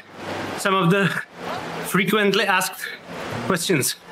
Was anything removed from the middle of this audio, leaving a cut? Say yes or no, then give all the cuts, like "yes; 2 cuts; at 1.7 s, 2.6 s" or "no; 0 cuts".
no; 0 cuts